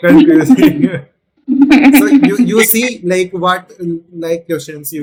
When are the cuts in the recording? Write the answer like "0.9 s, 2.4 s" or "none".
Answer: none